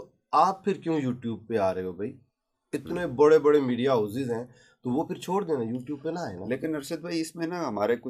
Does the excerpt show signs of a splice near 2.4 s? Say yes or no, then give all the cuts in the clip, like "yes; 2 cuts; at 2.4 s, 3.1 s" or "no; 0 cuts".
no; 0 cuts